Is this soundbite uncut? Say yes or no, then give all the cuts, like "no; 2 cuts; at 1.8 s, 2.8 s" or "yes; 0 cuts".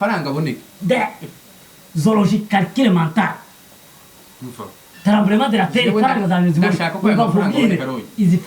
yes; 0 cuts